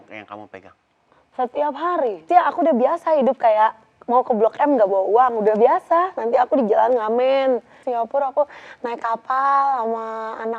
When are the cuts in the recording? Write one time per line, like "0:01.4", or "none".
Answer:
0:02.2
0:07.8